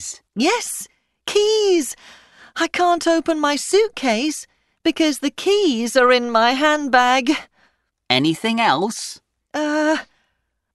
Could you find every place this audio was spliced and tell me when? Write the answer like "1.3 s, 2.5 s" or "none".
3.1 s